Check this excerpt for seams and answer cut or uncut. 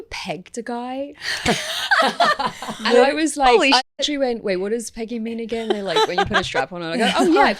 uncut